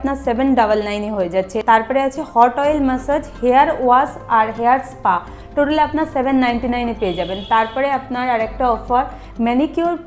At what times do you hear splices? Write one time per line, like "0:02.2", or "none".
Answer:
none